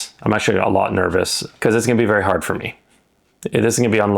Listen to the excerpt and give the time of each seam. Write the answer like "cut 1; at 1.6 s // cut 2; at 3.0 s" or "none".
cut 1; at 1.4 s